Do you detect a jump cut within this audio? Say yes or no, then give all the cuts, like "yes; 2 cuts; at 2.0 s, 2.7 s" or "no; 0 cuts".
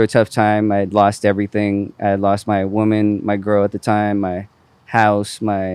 no; 0 cuts